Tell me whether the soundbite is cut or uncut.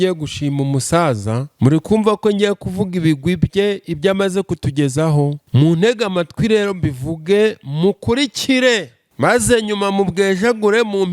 cut